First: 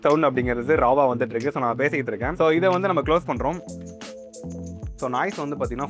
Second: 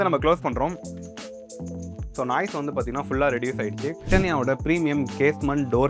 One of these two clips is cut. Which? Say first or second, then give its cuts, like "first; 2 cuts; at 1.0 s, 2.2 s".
second; 1 cut; at 4.1 s